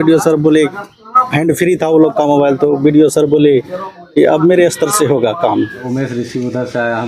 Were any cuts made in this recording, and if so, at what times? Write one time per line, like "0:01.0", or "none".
0:05.8